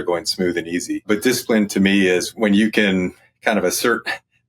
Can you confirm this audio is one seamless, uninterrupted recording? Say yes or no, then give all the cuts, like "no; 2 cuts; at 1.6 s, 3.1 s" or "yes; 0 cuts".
no; 2 cuts; at 1.0 s, 2.3 s